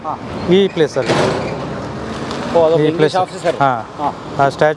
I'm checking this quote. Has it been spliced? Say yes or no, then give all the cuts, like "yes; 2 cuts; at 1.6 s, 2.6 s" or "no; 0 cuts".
no; 0 cuts